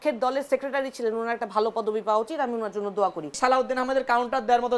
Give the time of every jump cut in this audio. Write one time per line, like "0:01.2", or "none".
0:03.4